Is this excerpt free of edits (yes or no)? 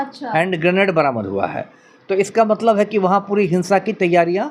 yes